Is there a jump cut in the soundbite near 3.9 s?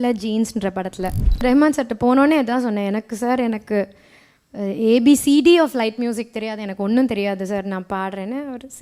no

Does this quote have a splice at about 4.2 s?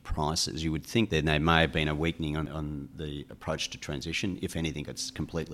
no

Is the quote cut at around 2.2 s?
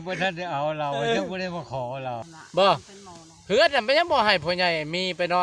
yes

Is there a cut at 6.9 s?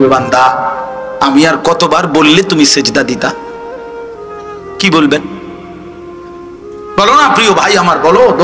no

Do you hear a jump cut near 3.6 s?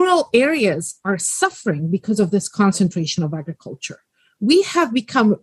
no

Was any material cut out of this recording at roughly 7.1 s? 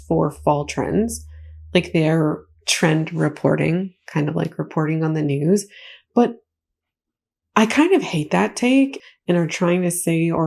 no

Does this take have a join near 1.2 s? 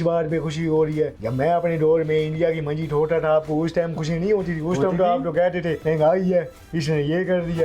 yes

